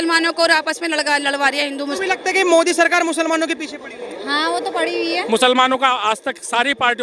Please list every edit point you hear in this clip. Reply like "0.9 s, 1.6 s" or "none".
2.0 s, 5.2 s